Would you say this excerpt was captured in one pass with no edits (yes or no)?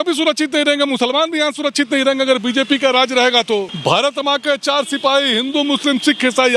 no